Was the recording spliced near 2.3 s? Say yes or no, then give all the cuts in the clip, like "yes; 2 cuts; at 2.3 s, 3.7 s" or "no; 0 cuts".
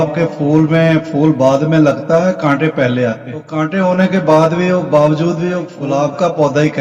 no; 2 cuts; at 3.5 s, 5.7 s